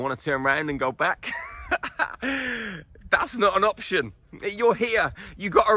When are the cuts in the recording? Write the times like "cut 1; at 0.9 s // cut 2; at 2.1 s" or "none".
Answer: none